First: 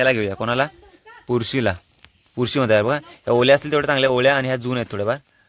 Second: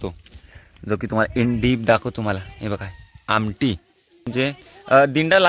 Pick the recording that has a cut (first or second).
second